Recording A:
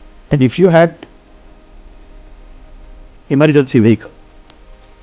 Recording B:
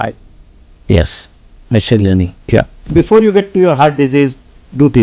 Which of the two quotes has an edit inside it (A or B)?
B